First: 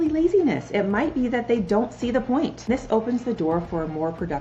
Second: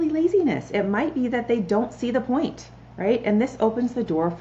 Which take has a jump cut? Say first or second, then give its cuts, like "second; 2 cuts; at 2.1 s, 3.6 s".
first; 1 cut; at 2.7 s